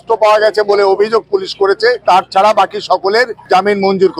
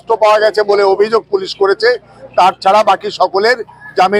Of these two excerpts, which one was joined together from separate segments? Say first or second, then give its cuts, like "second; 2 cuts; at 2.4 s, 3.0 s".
first; 2 cuts; at 2.0 s, 3.4 s